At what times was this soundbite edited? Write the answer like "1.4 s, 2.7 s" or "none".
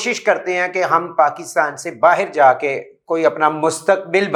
none

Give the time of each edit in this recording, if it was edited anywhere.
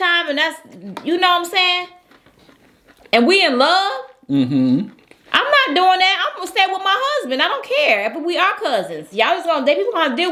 none

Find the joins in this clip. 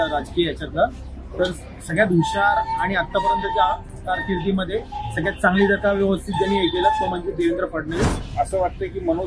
8.2 s

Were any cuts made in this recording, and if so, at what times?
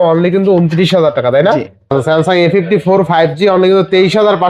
1.9 s

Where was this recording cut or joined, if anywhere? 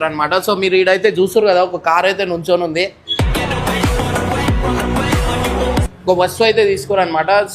5.9 s

